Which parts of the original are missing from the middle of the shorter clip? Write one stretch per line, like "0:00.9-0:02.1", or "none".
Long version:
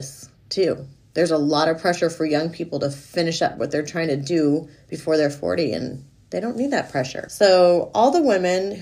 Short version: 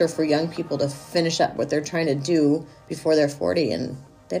none